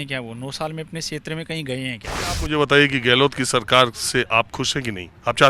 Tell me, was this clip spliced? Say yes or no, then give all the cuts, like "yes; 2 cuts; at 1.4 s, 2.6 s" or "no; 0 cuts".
yes; 1 cut; at 2.3 s